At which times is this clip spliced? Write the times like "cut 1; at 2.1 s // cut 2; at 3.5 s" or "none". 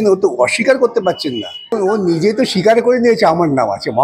cut 1; at 1.8 s